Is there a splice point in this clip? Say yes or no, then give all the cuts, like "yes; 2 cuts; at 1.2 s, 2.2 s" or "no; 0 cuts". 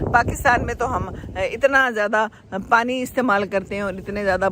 no; 0 cuts